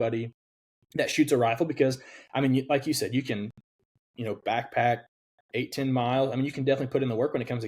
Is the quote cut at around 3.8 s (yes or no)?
no